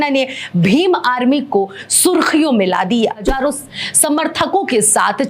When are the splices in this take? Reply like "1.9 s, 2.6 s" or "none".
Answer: 3.3 s